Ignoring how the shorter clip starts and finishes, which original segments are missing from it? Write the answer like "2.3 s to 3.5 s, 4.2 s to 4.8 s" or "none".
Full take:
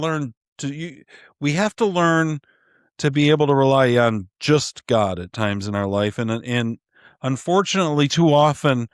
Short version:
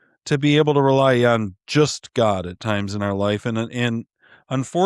none